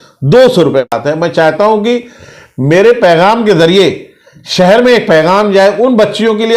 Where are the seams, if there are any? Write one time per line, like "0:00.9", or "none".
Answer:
0:01.0